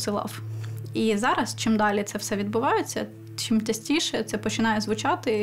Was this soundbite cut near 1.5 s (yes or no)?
no